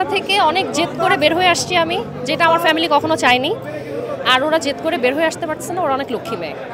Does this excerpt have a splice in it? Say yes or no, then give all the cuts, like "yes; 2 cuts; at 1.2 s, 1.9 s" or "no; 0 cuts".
no; 0 cuts